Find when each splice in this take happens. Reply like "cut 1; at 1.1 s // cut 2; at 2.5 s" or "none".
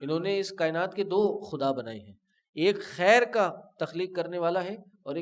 none